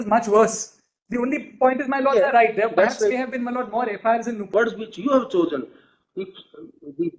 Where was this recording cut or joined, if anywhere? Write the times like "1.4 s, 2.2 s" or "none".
4.5 s